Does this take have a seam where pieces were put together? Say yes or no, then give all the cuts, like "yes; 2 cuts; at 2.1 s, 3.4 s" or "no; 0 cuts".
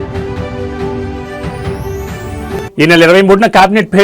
yes; 1 cut; at 2.1 s